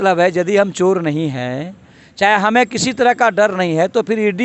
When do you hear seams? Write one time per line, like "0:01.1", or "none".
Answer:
none